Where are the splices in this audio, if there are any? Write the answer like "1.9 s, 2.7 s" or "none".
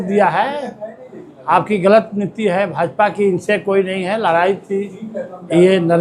none